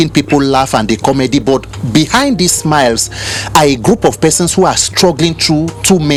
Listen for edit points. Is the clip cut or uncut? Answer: uncut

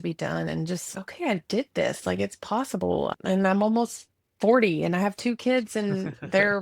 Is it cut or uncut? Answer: cut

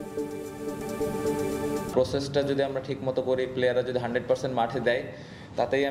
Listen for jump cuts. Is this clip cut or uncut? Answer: cut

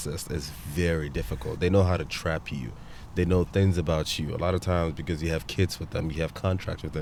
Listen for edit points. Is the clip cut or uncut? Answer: uncut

